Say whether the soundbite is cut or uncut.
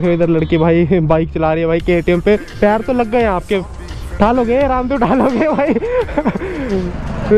cut